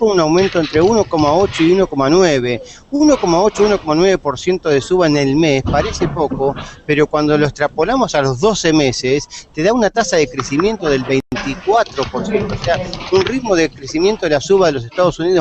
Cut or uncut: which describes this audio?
uncut